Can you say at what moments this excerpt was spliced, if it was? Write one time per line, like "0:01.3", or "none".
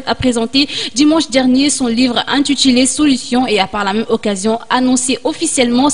none